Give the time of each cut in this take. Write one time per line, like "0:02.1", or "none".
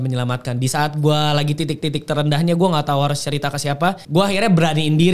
0:04.0